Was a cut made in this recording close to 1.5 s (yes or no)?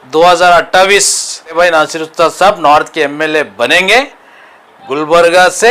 yes